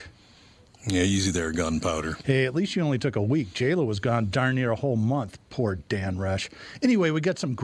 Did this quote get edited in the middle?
no; 0 cuts

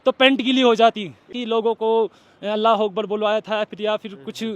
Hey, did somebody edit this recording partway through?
yes; 1 cut; at 1.4 s

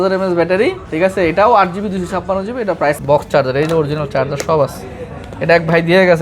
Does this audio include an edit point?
yes; 1 cut; at 3.0 s

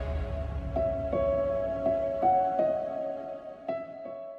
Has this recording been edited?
no; 0 cuts

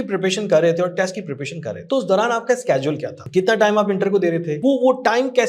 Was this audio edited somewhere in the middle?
yes; 3 cuts; at 1.7 s, 3.1 s, 4.5 s

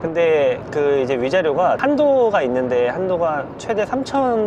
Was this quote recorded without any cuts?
yes; 0 cuts

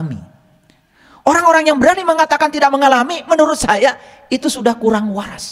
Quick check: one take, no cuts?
yes; 0 cuts

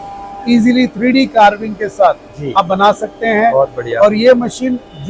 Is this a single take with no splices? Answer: yes; 0 cuts

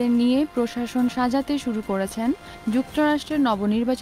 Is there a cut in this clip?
no; 0 cuts

